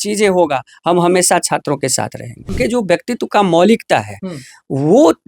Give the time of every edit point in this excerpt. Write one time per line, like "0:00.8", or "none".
0:02.5